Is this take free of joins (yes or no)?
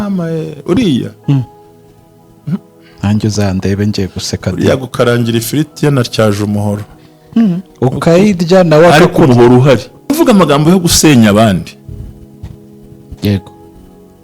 no